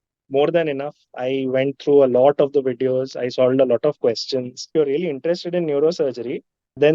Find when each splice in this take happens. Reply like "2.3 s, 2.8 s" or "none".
4.7 s